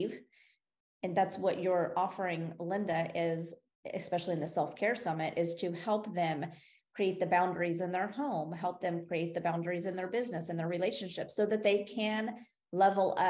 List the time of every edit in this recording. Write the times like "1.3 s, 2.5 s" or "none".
none